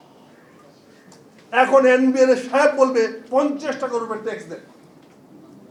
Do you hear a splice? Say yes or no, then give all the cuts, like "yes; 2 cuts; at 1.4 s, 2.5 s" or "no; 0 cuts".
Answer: no; 0 cuts